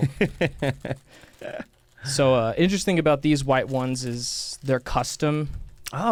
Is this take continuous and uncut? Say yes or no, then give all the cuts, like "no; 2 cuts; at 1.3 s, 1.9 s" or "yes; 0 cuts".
yes; 0 cuts